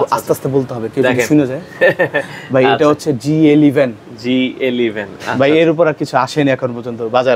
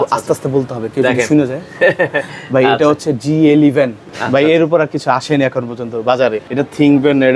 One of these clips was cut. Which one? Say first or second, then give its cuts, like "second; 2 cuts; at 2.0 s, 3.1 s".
second; 2 cuts; at 4.1 s, 6.4 s